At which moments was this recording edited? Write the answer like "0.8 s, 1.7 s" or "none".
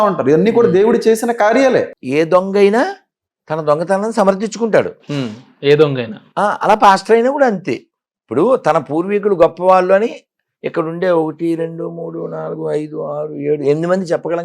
2.0 s